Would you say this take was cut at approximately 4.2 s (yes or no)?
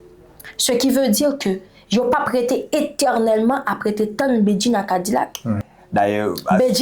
no